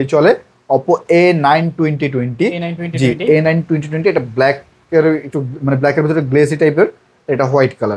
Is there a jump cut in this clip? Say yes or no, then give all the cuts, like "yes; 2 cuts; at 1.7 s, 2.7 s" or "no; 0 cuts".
no; 0 cuts